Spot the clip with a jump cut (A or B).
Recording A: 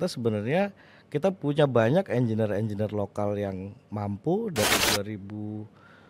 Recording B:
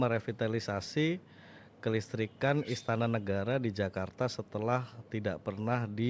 A